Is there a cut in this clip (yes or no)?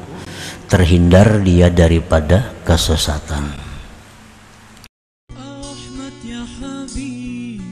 yes